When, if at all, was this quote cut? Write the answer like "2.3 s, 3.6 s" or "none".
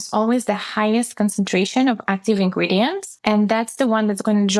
3.1 s